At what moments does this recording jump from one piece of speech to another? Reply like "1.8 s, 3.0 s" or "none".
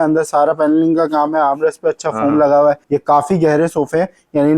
2.8 s